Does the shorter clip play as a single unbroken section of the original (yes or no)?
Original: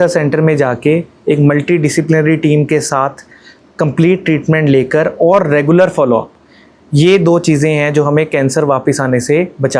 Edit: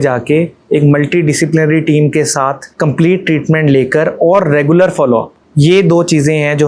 no